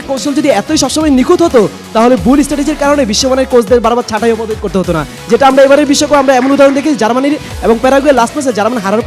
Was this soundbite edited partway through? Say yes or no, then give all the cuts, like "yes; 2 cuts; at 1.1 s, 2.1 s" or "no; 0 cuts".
no; 0 cuts